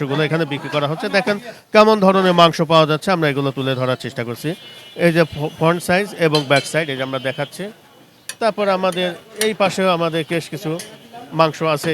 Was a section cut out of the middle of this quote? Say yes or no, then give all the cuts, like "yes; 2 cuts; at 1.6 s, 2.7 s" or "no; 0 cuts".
no; 0 cuts